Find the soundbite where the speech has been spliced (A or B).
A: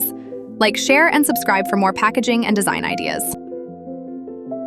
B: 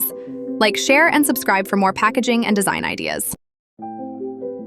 B